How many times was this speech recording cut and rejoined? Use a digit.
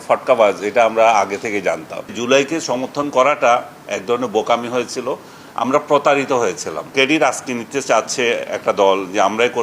2